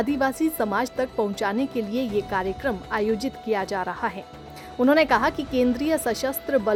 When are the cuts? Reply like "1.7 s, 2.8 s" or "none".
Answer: none